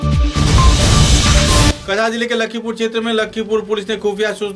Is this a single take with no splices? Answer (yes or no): no